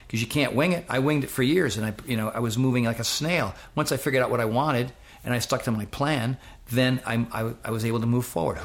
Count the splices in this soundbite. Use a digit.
0